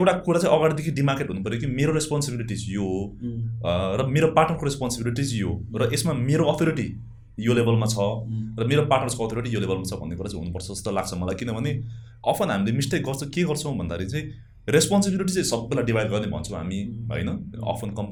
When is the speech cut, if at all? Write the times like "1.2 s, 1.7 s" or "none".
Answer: none